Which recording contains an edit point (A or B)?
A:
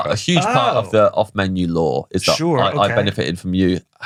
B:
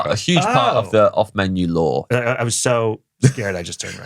B